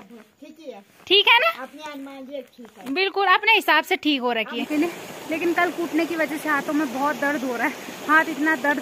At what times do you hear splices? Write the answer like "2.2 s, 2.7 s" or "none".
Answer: 4.7 s